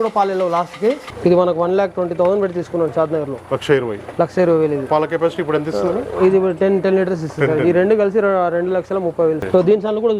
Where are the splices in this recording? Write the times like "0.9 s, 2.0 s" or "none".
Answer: 1.0 s, 9.4 s